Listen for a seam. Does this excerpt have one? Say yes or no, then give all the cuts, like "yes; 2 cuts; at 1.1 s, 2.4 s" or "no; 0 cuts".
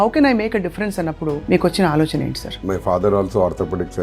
yes; 1 cut; at 2.6 s